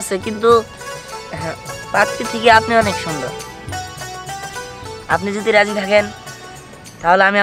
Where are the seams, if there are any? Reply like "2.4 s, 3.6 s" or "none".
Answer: 4.6 s